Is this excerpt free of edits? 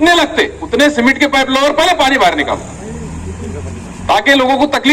yes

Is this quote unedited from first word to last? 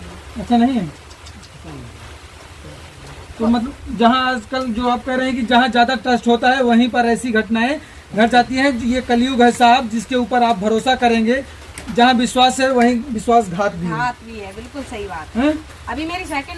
yes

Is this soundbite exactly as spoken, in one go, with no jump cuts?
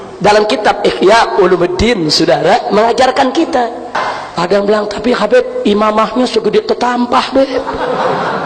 no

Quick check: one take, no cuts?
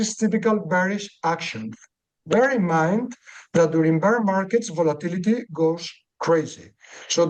yes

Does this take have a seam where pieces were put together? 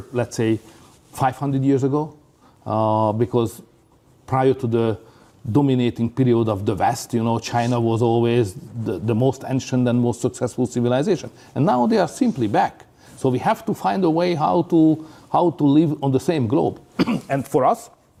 no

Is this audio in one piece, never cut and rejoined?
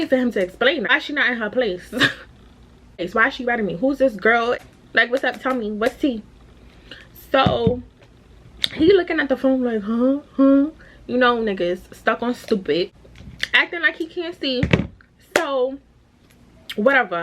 yes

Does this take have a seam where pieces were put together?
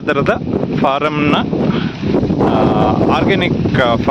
no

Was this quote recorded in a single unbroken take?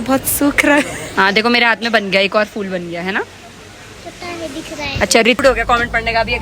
no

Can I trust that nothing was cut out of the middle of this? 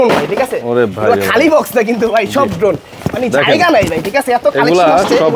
yes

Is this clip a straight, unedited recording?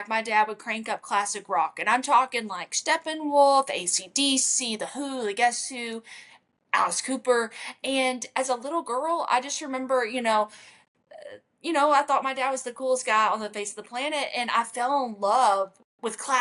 yes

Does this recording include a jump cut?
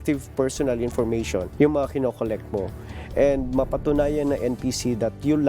yes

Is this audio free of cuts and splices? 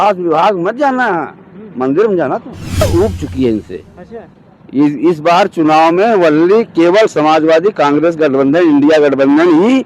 no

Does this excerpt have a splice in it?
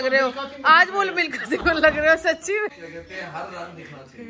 yes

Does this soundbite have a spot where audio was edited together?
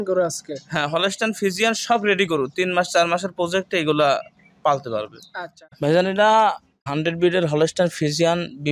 yes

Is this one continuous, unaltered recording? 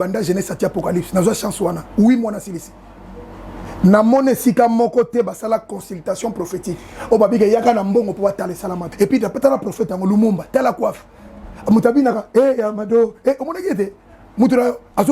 no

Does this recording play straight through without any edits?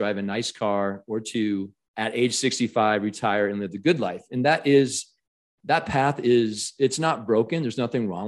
no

